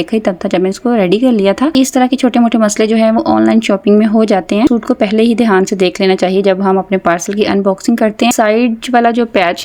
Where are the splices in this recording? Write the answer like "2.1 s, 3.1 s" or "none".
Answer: 1.7 s, 4.7 s, 8.3 s